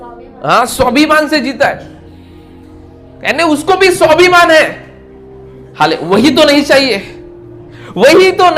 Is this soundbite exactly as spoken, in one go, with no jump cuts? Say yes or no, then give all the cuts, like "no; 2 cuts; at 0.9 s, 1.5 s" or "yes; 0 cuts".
yes; 0 cuts